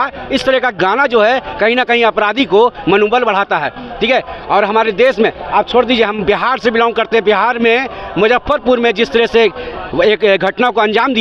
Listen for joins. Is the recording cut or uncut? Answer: uncut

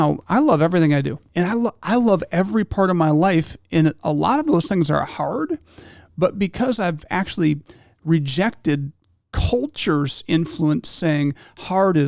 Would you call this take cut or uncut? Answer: cut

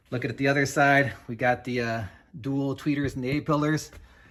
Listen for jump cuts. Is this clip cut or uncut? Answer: uncut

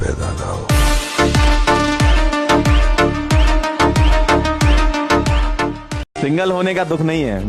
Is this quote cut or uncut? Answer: uncut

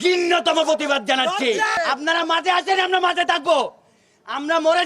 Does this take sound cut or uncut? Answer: cut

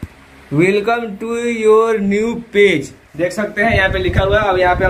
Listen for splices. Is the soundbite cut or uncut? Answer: uncut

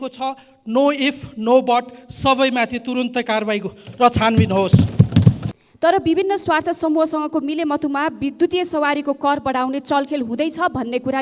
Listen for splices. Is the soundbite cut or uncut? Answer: cut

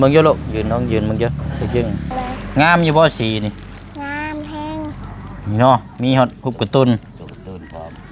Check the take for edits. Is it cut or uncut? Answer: cut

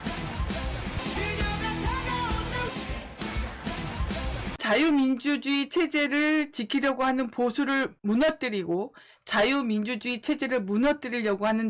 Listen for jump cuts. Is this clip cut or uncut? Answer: uncut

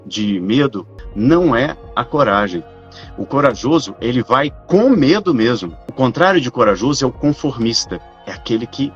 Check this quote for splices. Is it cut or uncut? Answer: cut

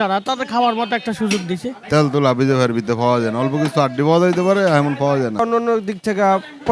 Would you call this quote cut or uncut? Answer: cut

